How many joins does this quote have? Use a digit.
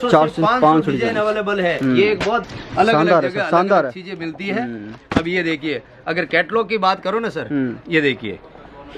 1